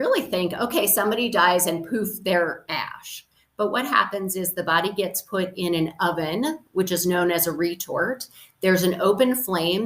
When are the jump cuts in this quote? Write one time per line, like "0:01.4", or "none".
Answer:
none